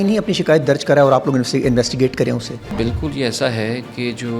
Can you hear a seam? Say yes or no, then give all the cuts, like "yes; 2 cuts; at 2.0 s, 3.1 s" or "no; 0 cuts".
yes; 1 cut; at 2.7 s